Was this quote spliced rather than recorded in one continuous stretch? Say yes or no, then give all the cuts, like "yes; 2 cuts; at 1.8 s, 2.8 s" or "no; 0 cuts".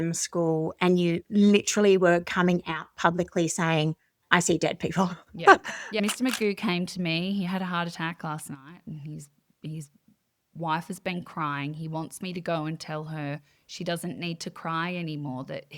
yes; 1 cut; at 6.0 s